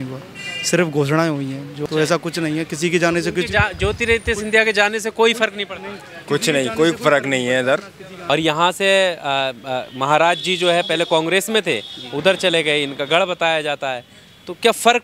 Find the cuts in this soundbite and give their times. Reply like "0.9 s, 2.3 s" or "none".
1.8 s, 8.3 s